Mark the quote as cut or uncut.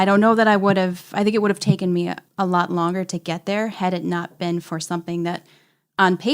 cut